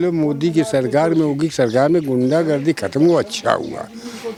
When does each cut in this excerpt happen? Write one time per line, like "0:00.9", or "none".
none

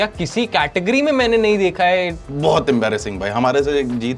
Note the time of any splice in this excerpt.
0:02.2

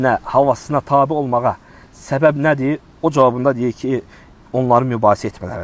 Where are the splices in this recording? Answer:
none

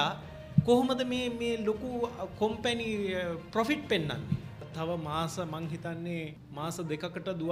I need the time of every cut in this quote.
0:04.7
0:06.4

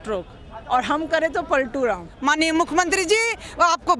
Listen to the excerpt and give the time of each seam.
0:02.1

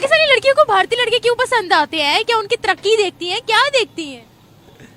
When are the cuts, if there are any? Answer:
none

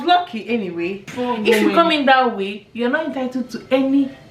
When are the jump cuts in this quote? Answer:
0:01.1

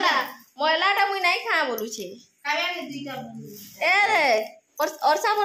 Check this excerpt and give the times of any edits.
none

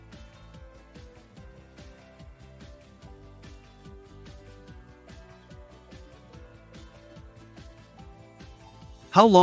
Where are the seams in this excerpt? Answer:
none

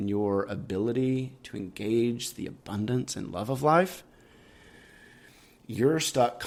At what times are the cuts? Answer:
none

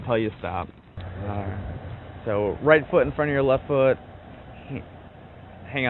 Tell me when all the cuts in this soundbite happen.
0:01.0

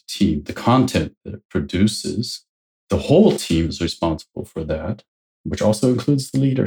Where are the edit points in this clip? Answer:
none

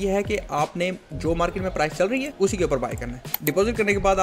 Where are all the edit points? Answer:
0:02.3
0:03.3

